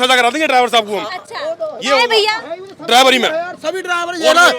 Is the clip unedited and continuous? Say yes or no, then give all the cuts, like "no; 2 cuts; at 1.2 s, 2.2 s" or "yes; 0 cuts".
yes; 0 cuts